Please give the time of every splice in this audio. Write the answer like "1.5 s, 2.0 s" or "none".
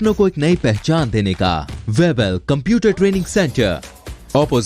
1.7 s